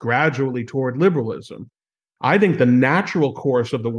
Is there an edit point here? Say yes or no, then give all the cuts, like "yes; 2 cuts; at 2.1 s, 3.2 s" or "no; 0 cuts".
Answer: no; 0 cuts